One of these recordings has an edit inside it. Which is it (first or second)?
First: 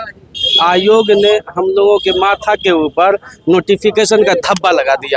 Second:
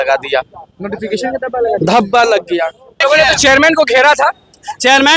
second